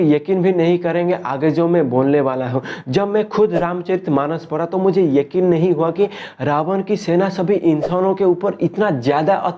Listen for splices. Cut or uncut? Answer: uncut